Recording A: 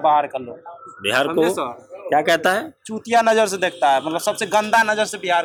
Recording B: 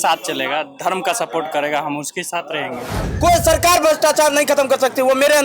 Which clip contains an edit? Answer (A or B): B